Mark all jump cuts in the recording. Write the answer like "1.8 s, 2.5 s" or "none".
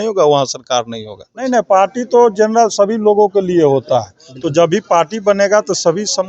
1.4 s